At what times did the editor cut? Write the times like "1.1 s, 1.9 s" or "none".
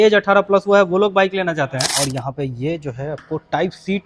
1.9 s